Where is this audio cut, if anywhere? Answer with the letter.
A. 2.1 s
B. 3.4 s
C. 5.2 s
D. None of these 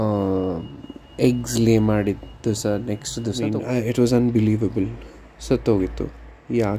B